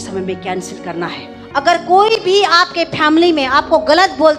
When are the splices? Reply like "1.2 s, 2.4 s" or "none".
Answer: 1.3 s